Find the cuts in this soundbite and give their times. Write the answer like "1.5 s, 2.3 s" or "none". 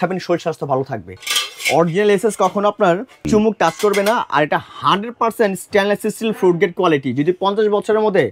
1.2 s, 3.1 s